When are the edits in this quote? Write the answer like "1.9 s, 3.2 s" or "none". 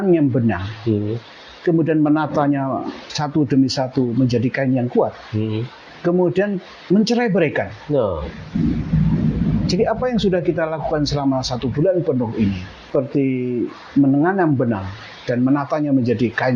6.7 s, 12.7 s